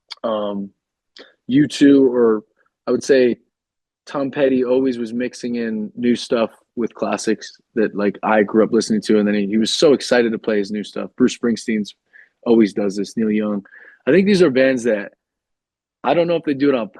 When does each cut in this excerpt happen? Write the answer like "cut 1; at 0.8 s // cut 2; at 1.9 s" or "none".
none